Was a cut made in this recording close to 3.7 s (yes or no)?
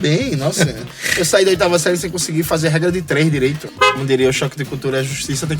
yes